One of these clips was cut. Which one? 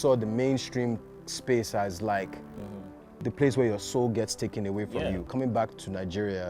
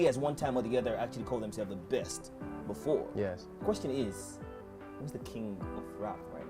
first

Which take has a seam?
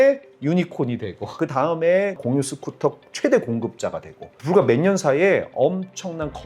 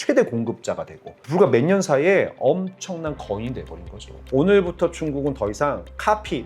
second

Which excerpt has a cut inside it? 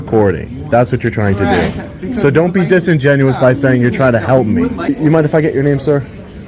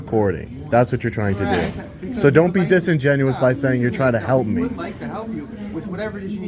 first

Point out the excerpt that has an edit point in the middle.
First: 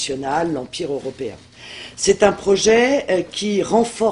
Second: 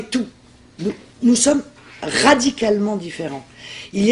first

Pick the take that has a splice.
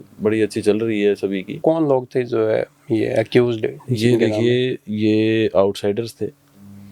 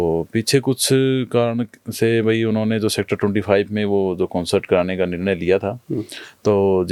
first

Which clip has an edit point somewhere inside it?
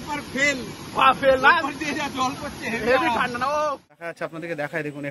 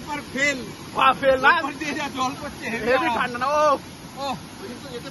first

